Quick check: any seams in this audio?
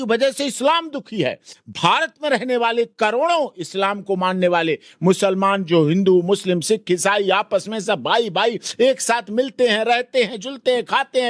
no; 0 cuts

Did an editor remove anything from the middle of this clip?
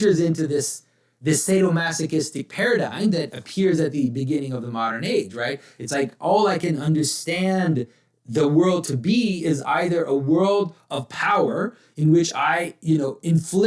no; 0 cuts

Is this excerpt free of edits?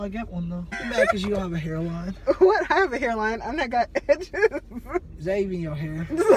no; 2 cuts; at 0.8 s, 5.1 s

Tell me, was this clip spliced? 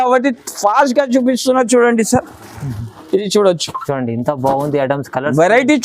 no; 0 cuts

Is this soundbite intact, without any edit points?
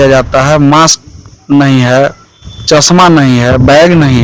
yes; 0 cuts

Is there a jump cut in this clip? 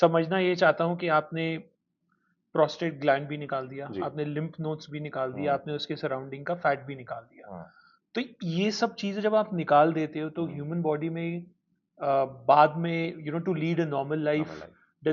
no; 0 cuts

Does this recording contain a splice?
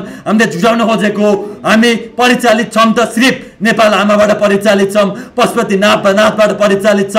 no; 0 cuts

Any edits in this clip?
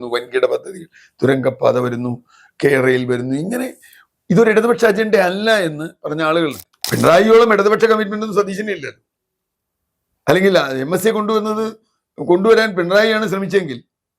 yes; 1 cut; at 6.7 s

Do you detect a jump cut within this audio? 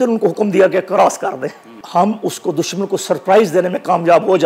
yes; 1 cut; at 1.7 s

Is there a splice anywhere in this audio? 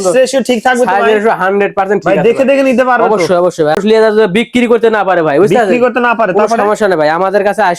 yes; 1 cut; at 3.8 s

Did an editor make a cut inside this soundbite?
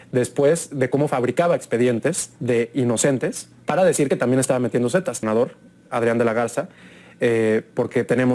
yes; 1 cut; at 5.2 s

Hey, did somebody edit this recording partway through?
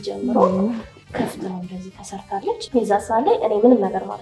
yes; 1 cut; at 2.6 s

